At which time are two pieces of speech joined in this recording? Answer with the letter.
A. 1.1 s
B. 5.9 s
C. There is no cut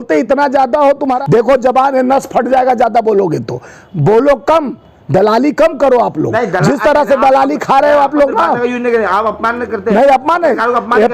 A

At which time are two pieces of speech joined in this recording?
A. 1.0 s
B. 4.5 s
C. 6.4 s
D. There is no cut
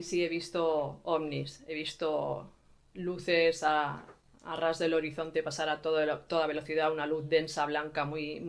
A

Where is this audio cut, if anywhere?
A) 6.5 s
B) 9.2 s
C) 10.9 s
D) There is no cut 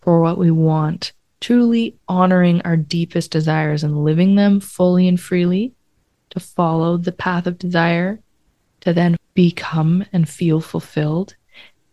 B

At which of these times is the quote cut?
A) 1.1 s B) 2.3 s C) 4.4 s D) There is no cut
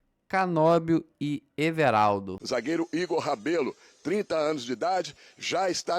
B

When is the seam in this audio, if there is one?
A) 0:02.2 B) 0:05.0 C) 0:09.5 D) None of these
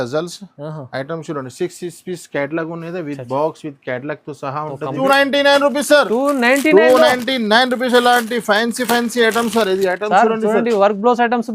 B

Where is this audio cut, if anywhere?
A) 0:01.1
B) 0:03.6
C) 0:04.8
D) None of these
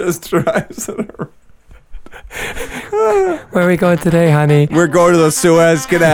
C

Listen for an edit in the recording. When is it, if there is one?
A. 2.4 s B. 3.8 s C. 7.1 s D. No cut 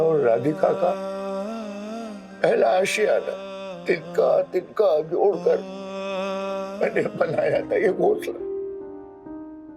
B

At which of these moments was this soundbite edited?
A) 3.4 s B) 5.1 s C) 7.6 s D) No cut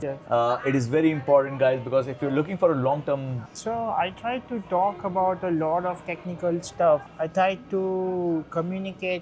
A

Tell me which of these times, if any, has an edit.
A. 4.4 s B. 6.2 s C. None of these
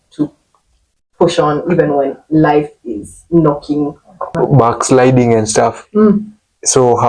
A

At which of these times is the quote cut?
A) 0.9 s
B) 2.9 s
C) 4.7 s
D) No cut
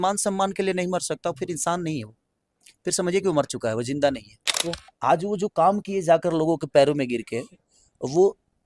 C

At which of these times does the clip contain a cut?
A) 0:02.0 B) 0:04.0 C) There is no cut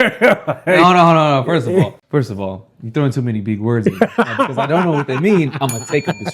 A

